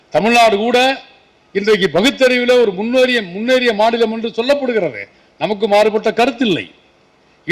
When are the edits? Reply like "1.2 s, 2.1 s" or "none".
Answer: none